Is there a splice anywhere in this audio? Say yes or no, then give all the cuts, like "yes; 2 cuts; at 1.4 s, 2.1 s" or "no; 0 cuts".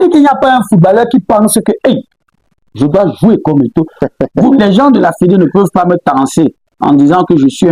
yes; 1 cut; at 4.0 s